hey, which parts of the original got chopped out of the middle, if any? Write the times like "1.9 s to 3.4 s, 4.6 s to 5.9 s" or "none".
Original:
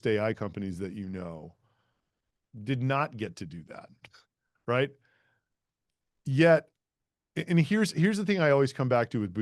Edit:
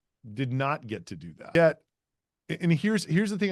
3.8 s to 6.4 s